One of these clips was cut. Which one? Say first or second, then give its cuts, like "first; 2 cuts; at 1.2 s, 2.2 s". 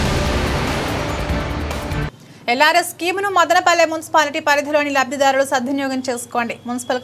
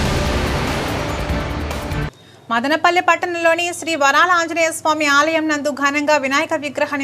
second; 1 cut; at 2.0 s